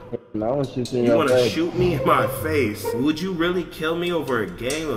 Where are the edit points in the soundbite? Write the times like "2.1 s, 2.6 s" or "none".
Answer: 2.9 s